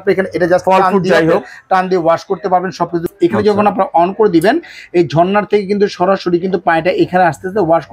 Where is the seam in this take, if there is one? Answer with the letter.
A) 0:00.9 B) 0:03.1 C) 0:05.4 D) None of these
B